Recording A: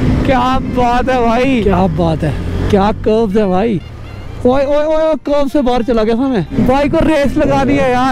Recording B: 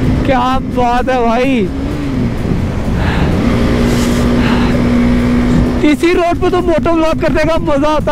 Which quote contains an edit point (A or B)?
A